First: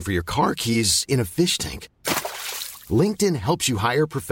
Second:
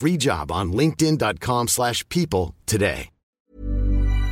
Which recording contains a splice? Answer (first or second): second